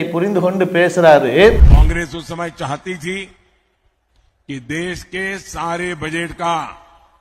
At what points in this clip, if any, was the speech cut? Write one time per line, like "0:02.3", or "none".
0:01.7